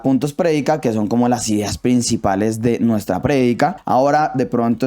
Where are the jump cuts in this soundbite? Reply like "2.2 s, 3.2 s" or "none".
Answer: 3.8 s